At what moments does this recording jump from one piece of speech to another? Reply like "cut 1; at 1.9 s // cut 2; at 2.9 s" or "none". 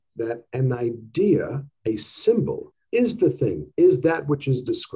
cut 1; at 1.7 s // cut 2; at 2.7 s

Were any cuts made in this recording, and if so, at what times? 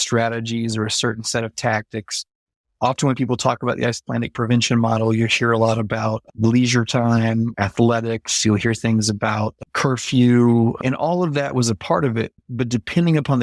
cut 1; at 10.8 s // cut 2; at 12.4 s

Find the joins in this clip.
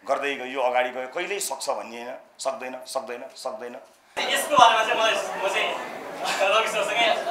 cut 1; at 4.3 s

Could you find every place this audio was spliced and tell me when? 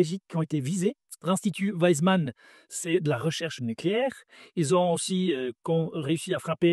cut 1; at 1.1 s

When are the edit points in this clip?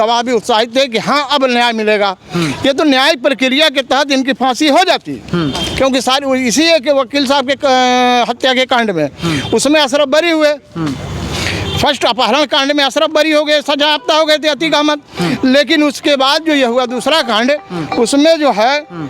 none

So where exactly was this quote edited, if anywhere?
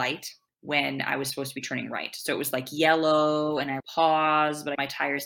none

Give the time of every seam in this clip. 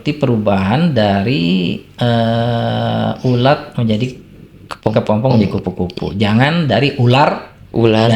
none

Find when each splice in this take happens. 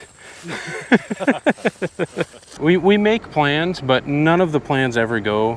cut 1; at 2.5 s

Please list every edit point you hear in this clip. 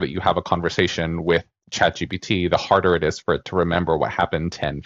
none

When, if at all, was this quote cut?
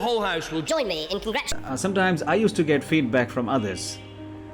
cut 1; at 1.5 s

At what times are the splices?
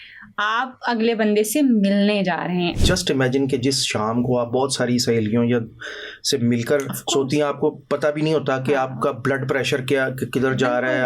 cut 1; at 2.7 s

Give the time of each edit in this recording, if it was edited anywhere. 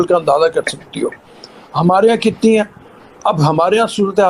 none

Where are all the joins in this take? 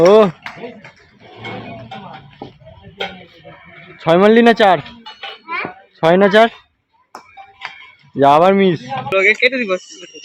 cut 1; at 9.1 s

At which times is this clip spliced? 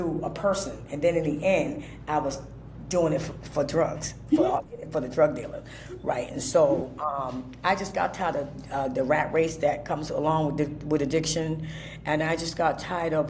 none

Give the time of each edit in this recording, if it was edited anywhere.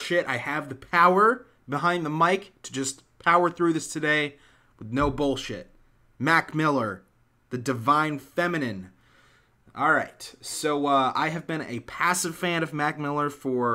cut 1; at 8.3 s

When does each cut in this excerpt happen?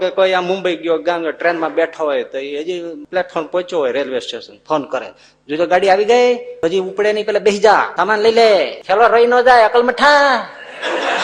cut 1; at 3.0 s // cut 2; at 6.5 s // cut 3; at 7.9 s // cut 4; at 8.8 s

